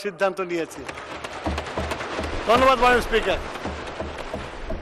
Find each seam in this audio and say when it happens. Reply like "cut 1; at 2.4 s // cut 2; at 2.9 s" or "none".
none